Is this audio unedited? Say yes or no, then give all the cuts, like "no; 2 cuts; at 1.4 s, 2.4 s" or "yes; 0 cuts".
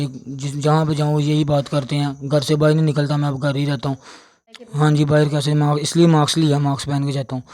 no; 1 cut; at 4.5 s